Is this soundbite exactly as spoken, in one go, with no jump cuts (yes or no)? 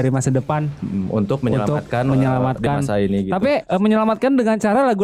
yes